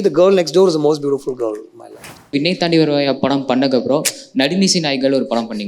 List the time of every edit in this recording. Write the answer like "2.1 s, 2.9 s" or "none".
2.3 s

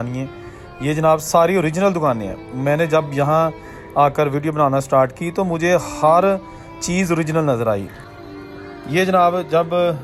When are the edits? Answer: none

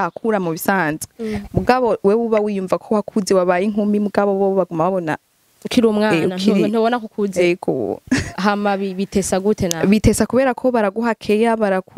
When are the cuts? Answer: none

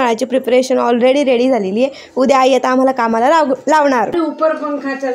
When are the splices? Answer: 4.1 s

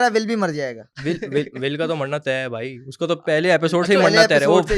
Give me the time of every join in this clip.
none

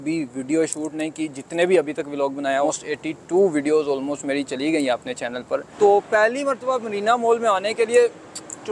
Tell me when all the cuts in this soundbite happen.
2.7 s, 5.7 s

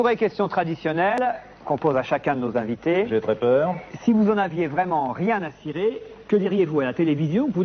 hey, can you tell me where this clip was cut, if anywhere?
1.1 s

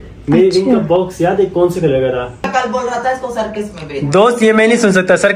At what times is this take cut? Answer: 2.5 s

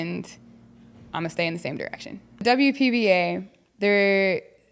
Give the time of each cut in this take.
2.4 s

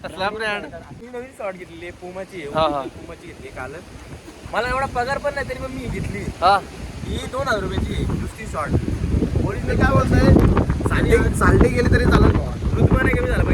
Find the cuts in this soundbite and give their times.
1.1 s

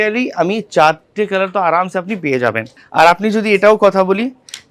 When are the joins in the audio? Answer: none

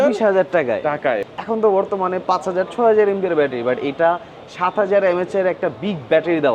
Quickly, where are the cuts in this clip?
1.3 s

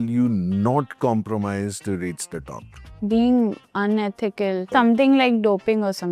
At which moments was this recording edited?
4.7 s

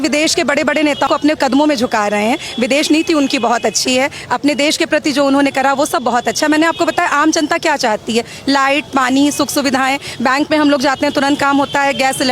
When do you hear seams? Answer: 1.1 s

